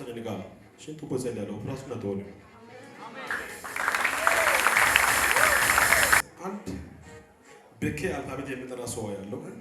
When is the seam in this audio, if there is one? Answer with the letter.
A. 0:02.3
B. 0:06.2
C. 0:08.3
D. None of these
B